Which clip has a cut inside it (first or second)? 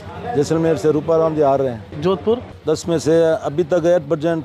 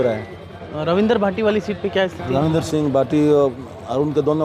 first